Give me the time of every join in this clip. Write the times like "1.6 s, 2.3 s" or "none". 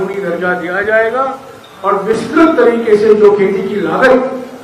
none